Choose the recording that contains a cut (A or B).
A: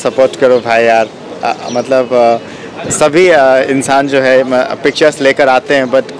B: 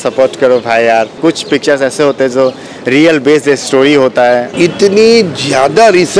B